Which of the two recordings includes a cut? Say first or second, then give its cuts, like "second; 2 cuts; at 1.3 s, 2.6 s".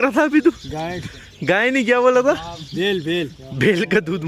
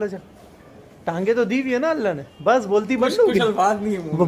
second; 1 cut; at 2.3 s